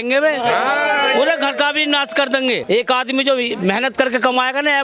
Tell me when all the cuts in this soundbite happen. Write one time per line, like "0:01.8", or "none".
0:02.6